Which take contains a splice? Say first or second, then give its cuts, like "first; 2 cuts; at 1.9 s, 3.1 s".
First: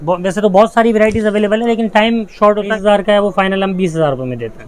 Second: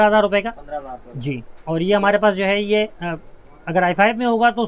first; 1 cut; at 2.7 s